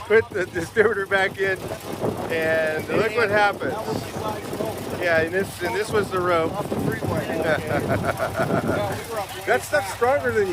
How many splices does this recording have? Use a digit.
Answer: 0